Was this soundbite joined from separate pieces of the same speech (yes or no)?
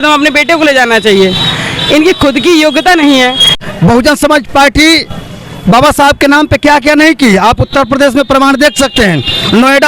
yes